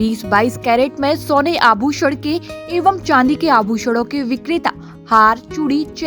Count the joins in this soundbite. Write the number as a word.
zero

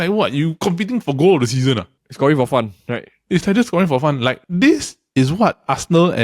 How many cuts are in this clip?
zero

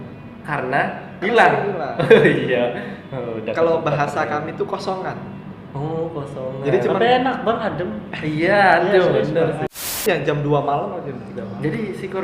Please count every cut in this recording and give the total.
one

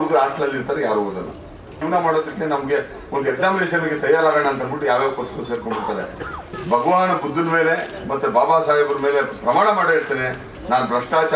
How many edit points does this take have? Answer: two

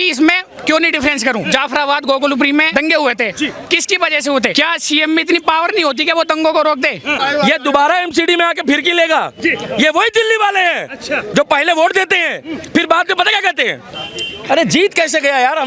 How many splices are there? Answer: four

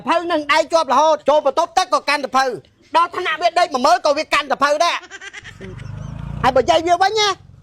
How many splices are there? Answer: two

